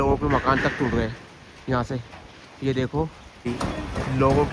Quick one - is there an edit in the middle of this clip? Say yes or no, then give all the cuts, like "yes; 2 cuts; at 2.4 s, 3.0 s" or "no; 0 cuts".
yes; 1 cut; at 3.4 s